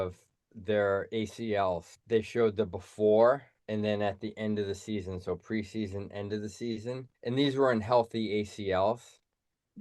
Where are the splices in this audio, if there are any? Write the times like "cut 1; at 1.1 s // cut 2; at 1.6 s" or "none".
cut 1; at 1.9 s // cut 2; at 3.5 s // cut 3; at 7.1 s